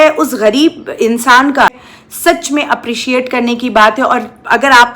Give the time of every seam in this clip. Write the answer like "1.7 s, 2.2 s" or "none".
1.7 s